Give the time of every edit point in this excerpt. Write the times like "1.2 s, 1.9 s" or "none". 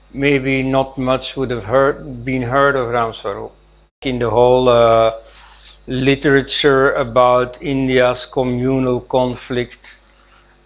4.0 s